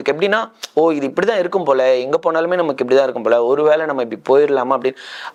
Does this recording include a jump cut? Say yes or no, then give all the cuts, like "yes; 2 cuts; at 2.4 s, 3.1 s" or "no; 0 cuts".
no; 0 cuts